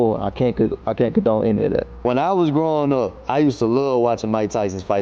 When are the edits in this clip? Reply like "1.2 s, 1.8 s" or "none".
1.9 s